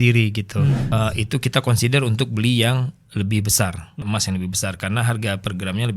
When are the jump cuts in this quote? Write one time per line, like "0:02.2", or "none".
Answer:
0:00.8
0:04.0